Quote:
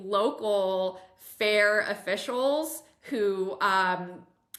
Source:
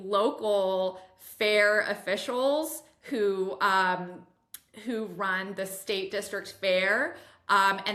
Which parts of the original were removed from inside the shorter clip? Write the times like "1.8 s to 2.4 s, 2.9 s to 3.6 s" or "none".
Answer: none